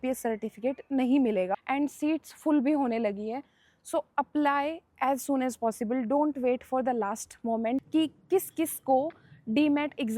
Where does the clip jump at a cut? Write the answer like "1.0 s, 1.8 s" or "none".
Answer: 1.5 s, 7.9 s

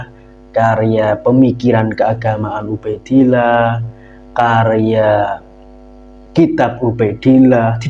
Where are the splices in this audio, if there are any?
none

